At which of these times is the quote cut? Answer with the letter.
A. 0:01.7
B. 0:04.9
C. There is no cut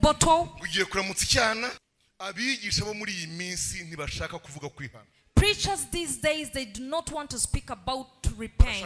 A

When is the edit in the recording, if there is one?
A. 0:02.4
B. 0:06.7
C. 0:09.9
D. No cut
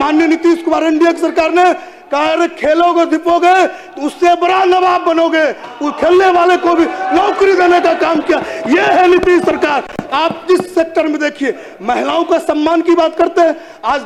D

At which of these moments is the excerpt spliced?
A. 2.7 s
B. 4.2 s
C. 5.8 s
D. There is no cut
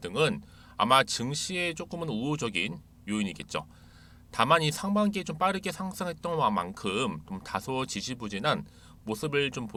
D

